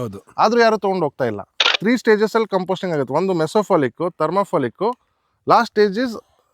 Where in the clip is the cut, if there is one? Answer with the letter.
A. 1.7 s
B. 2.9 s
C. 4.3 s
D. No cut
A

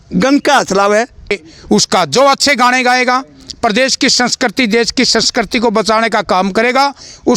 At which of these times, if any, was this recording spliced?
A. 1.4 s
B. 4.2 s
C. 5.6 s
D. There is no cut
A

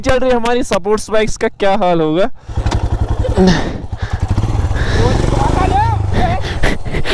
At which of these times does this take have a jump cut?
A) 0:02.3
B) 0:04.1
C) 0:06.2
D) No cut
A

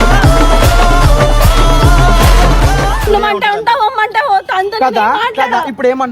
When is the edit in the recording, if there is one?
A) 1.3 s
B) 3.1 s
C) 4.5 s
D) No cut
B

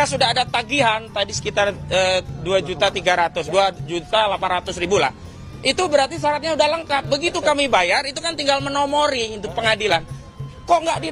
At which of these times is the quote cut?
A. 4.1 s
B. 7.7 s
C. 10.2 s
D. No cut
D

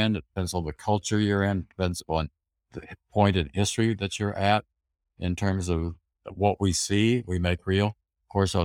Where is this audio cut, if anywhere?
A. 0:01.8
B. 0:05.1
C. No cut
C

